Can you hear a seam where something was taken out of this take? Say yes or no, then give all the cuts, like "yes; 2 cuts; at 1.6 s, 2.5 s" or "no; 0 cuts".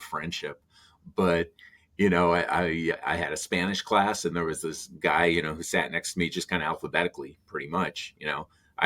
yes; 1 cut; at 2.9 s